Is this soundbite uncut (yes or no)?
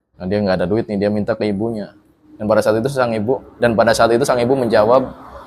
yes